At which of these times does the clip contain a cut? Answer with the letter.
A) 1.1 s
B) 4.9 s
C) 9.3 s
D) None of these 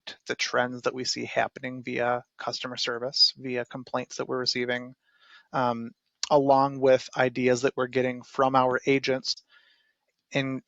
C